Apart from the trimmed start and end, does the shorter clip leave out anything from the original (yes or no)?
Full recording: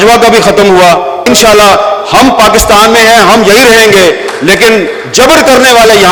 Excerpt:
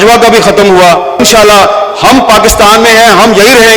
yes